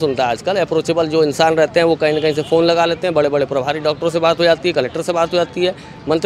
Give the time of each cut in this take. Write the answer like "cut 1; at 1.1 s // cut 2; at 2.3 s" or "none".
none